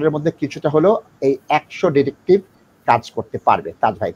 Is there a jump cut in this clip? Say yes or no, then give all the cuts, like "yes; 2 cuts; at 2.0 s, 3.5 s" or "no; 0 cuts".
no; 0 cuts